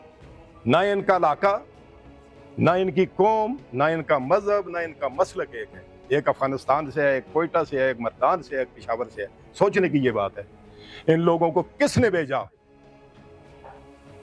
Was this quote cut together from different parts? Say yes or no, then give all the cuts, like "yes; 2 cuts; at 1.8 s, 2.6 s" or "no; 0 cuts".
yes; 1 cut; at 12.8 s